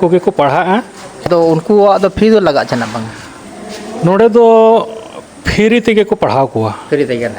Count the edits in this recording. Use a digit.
1